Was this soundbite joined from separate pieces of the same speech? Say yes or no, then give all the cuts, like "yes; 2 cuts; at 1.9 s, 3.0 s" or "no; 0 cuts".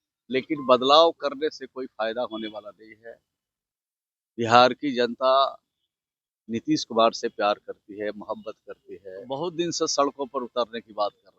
yes; 1 cut; at 9.4 s